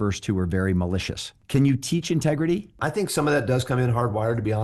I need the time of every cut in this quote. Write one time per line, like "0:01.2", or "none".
0:01.3
0:02.8